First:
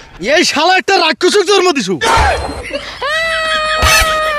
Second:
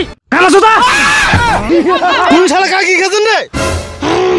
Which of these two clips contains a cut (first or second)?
second